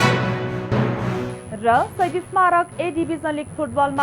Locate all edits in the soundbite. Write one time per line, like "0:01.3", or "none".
0:01.0